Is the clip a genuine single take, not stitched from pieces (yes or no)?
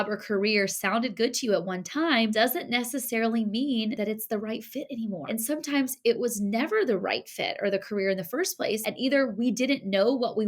yes